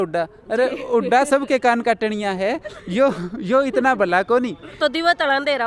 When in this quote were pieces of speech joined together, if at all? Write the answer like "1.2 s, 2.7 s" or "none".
4.8 s